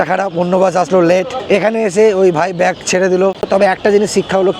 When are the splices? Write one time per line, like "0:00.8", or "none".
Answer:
0:01.4
0:03.4